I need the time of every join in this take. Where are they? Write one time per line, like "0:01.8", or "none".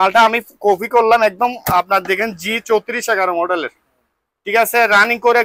none